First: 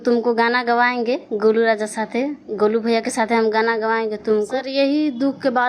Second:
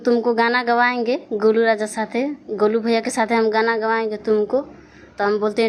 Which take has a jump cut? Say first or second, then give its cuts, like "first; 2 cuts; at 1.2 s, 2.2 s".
first; 1 cut; at 4.6 s